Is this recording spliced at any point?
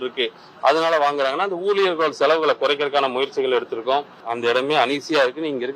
yes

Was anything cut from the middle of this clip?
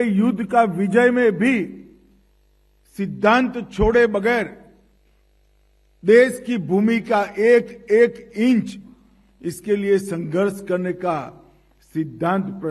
no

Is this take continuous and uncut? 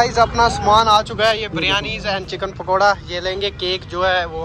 yes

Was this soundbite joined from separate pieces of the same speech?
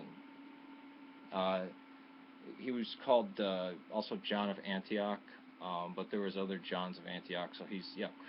yes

